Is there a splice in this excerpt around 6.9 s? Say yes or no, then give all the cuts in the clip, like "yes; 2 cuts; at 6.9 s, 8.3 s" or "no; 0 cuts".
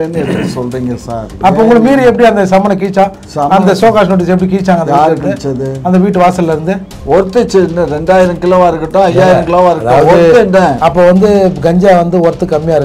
yes; 1 cut; at 6.9 s